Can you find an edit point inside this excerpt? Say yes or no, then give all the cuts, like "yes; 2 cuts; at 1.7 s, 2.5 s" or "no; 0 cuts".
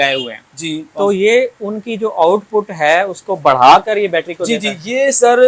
no; 0 cuts